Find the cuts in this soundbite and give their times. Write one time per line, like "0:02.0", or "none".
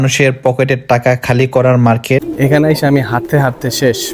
0:02.2